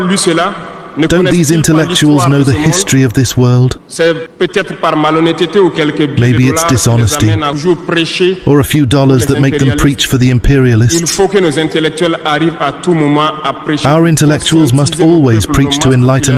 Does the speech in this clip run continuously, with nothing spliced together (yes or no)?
yes